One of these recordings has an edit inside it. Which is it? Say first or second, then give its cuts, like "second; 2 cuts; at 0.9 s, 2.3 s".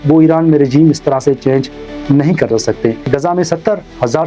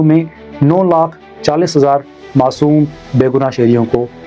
first; 1 cut; at 3.0 s